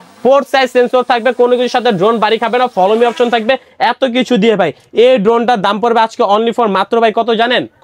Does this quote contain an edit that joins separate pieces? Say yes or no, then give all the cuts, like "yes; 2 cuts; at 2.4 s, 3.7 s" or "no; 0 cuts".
no; 0 cuts